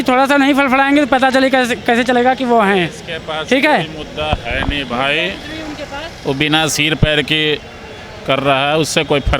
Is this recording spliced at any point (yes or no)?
no